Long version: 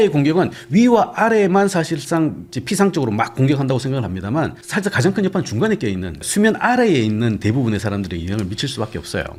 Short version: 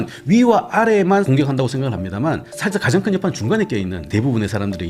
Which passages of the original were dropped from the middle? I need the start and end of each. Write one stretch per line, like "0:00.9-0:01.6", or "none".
0:01.7-0:03.4
0:06.2-0:07.4